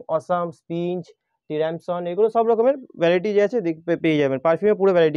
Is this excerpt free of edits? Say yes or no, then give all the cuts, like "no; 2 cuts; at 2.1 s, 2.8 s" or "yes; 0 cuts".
yes; 0 cuts